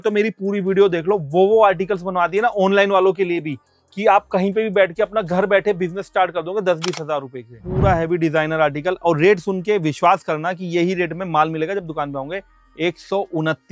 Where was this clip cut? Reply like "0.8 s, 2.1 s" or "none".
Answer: 7.6 s